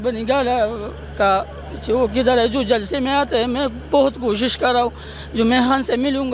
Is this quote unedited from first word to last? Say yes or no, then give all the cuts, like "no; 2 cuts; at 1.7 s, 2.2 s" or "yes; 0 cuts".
yes; 0 cuts